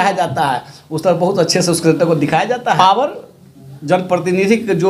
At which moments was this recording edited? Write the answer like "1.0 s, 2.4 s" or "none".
2.8 s